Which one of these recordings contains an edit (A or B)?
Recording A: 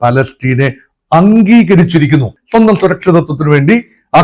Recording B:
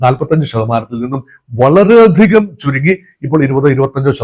A